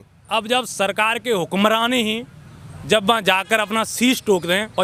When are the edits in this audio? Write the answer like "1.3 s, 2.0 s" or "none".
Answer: none